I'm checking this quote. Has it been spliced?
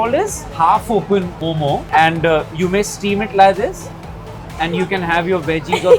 yes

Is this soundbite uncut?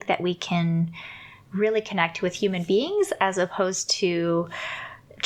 yes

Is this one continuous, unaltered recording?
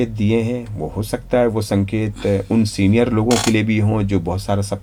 yes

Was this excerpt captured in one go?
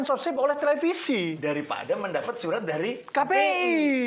yes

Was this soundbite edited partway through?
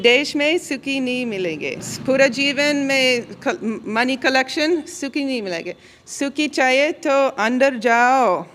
yes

